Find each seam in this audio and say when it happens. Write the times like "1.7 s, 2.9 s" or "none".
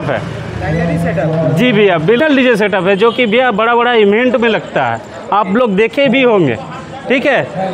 2.2 s